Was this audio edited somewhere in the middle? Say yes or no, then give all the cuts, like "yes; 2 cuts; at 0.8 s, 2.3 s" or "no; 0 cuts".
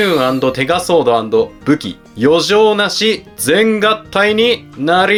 no; 0 cuts